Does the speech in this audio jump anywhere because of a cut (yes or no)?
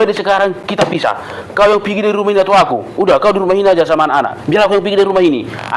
no